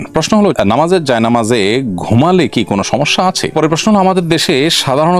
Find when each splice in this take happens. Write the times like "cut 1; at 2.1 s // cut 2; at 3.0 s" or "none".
cut 1; at 3.4 s